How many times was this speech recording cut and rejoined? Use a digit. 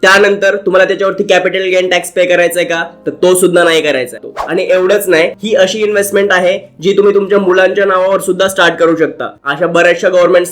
3